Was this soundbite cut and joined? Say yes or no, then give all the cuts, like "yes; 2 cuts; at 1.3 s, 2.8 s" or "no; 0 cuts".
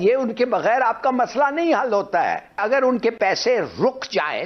yes; 1 cut; at 2.6 s